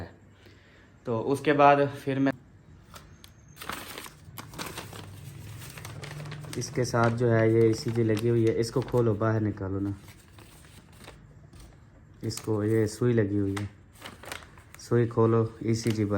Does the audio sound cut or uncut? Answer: cut